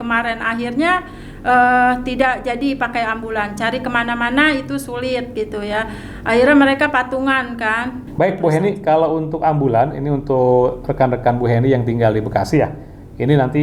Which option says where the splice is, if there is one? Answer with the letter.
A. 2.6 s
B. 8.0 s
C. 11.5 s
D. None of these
B